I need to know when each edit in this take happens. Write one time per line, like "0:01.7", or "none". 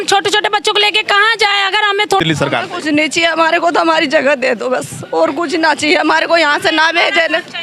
0:02.2